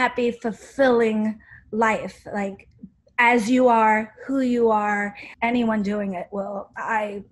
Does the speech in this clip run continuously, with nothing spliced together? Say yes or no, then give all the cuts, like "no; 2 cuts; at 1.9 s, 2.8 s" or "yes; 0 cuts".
no; 1 cut; at 5.2 s